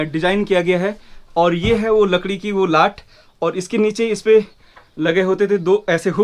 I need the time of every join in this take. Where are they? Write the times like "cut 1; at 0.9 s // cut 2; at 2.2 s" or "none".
none

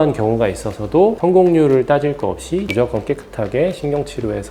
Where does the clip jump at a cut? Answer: cut 1; at 2.7 s

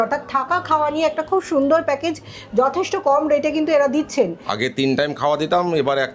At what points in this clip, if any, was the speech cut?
cut 1; at 4.4 s

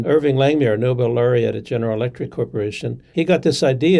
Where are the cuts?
cut 1; at 2.9 s

